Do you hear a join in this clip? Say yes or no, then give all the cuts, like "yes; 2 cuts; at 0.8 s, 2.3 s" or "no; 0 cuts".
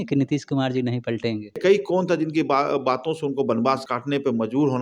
yes; 2 cuts; at 1.6 s, 3.9 s